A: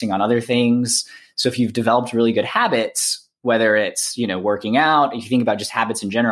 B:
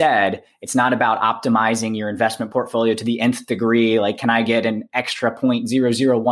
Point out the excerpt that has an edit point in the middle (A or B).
B